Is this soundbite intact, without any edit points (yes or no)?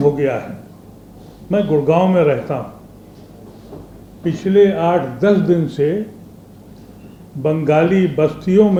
yes